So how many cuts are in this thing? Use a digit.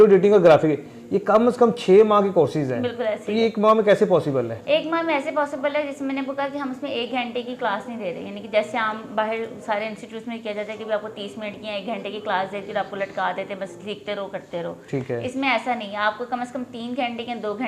0